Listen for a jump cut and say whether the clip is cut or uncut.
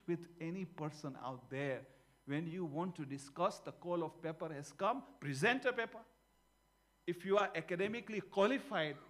uncut